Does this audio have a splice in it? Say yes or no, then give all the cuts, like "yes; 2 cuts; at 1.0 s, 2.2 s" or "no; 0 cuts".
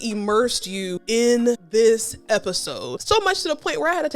yes; 2 cuts; at 1.2 s, 3.0 s